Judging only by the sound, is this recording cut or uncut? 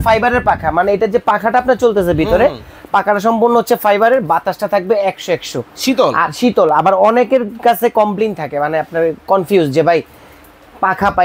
uncut